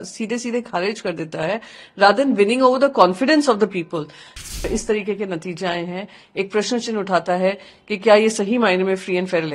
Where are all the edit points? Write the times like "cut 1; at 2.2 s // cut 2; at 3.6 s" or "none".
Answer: cut 1; at 4.7 s